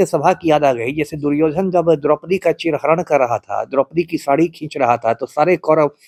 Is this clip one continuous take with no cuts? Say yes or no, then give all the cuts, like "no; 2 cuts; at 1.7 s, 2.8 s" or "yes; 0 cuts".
yes; 0 cuts